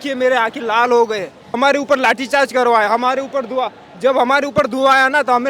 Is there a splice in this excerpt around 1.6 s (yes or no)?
yes